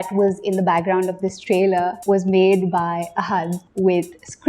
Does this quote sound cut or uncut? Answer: cut